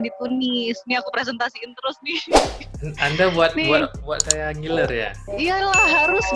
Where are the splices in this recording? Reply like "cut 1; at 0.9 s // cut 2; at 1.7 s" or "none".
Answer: none